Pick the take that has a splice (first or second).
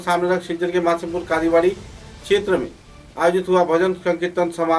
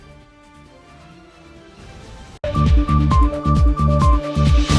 second